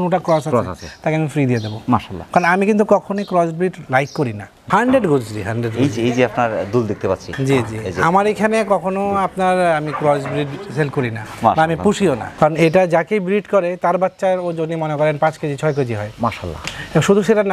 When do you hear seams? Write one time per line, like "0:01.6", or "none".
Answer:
0:04.6
0:12.3